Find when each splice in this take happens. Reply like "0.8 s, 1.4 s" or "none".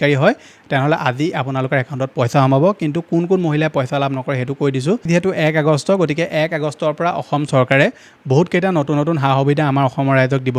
5.1 s